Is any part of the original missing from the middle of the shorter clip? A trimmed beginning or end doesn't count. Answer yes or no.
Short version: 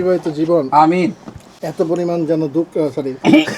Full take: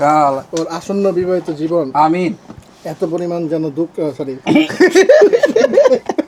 no